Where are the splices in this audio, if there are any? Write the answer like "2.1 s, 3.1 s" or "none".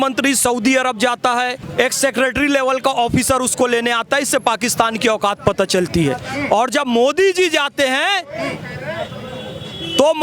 1.6 s